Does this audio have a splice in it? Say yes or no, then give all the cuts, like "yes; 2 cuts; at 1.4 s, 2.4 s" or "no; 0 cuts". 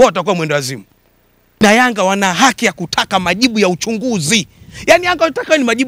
yes; 1 cut; at 1.6 s